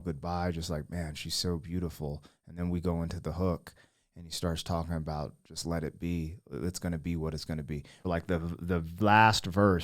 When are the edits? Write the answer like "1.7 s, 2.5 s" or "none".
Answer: 8.1 s